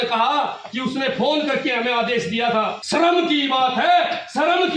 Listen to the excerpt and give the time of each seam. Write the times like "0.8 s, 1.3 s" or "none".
2.8 s